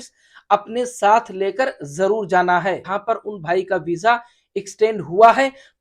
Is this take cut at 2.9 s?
yes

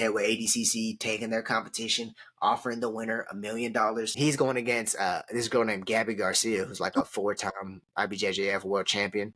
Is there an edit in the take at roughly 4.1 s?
yes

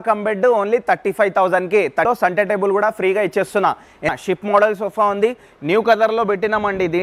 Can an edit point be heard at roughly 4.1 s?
yes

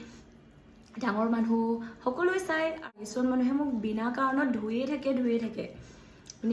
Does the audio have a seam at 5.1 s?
no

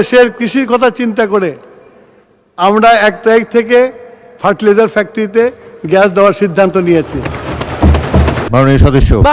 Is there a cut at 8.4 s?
yes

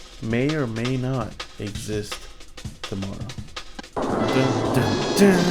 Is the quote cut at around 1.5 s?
no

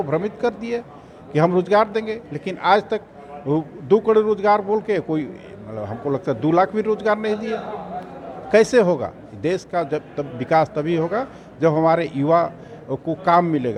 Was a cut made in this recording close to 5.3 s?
no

